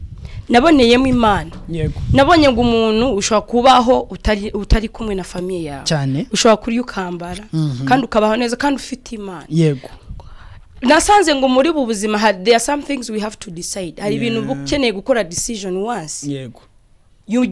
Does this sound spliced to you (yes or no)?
no